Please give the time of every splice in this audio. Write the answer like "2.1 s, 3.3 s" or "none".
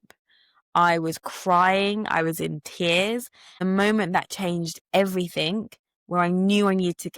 3.6 s